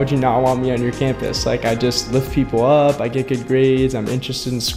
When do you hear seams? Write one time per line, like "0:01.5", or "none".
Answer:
none